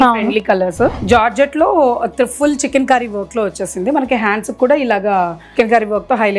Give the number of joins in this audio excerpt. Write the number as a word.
one